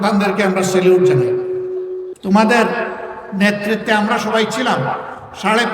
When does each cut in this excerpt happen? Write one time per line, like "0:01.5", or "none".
0:02.1